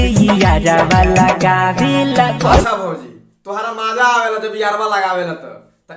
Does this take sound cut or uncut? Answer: cut